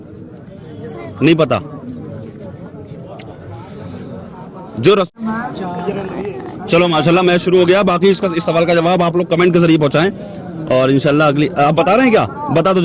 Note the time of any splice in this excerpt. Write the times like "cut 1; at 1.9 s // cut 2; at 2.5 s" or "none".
cut 1; at 5.1 s